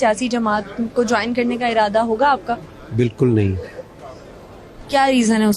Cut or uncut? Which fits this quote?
uncut